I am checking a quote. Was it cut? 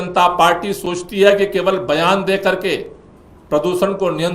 no; 0 cuts

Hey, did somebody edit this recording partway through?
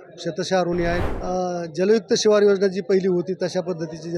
yes; 1 cut; at 1.0 s

